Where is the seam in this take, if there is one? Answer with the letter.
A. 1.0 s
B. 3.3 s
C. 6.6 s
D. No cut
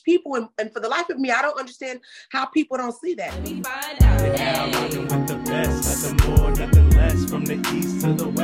B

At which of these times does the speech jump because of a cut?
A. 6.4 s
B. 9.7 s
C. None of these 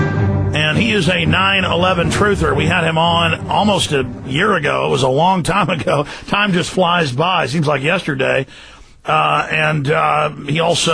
C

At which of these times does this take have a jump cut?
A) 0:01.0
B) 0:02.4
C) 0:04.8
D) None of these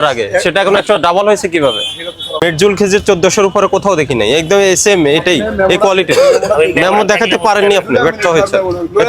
B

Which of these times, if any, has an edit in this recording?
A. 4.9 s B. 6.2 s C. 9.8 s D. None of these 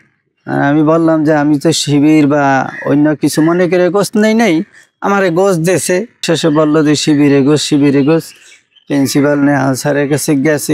B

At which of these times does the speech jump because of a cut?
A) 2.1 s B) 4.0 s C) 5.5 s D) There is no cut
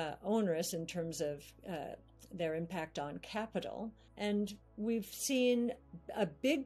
B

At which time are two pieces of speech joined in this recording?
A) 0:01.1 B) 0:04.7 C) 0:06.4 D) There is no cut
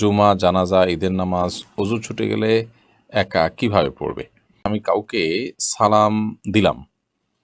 B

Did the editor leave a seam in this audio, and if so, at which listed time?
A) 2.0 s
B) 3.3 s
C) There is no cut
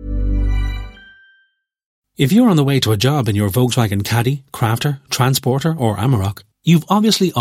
A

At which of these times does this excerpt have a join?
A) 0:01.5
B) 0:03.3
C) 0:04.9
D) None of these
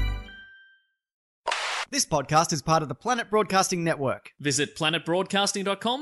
A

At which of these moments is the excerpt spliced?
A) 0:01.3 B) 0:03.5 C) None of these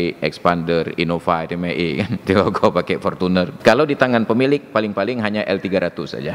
B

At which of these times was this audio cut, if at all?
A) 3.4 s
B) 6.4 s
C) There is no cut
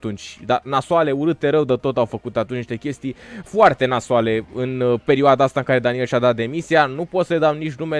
C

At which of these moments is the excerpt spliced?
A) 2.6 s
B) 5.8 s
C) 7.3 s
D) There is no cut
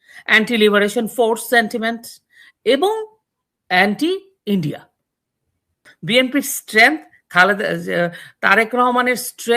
B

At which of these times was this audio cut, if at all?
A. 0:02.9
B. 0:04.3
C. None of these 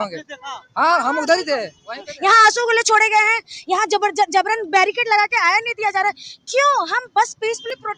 C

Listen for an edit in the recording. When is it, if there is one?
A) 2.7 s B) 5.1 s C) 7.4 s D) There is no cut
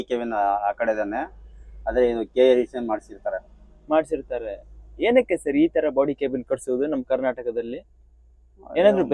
D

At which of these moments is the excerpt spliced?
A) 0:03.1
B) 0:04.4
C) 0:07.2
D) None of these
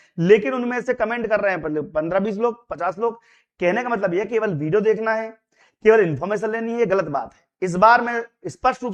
D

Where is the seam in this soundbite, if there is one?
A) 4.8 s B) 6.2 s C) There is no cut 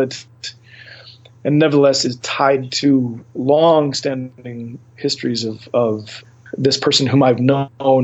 B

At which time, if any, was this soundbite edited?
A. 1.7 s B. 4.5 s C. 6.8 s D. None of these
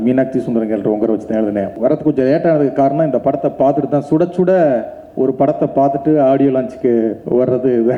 A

